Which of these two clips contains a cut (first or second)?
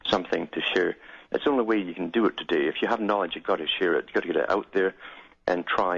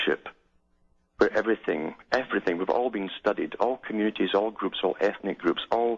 second